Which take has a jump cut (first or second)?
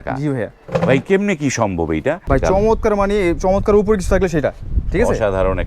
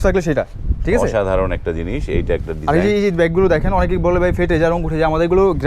first